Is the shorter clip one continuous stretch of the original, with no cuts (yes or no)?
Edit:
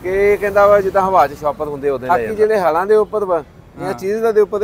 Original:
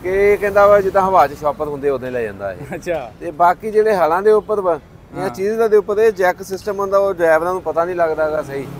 no